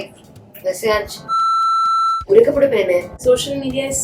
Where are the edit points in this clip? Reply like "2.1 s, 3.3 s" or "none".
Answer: 3.1 s